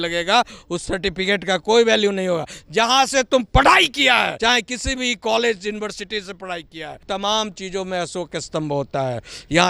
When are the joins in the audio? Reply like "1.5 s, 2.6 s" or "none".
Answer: 4.3 s, 7.0 s